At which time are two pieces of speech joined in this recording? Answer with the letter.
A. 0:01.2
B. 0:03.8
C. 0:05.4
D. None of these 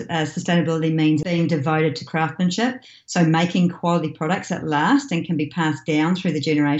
A